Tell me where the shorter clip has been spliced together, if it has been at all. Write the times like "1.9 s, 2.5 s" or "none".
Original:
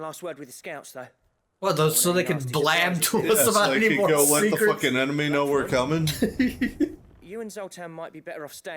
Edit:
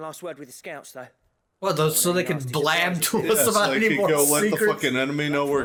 none